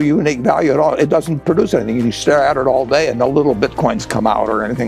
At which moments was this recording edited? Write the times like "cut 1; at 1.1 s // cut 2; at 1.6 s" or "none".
none